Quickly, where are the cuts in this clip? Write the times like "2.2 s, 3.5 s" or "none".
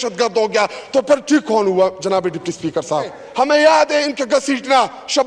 3.2 s